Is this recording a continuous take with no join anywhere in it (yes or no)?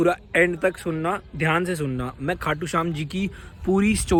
yes